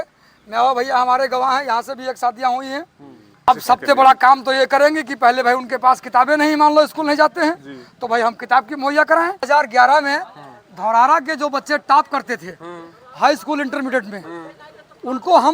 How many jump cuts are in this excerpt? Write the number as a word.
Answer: two